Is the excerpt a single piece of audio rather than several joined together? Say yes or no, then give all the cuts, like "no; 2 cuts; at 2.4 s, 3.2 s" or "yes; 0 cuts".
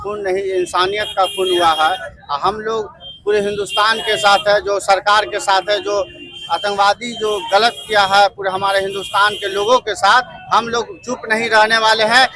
yes; 0 cuts